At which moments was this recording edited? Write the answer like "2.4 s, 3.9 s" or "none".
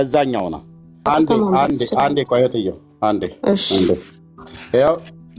1.1 s